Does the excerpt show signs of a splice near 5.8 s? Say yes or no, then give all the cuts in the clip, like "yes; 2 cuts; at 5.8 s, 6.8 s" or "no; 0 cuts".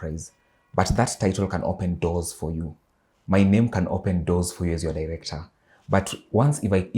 no; 0 cuts